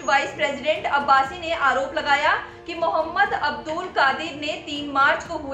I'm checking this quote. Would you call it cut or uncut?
uncut